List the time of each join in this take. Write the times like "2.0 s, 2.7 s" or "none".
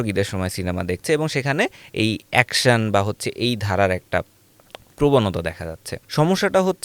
none